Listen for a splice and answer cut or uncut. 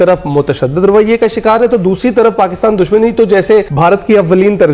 cut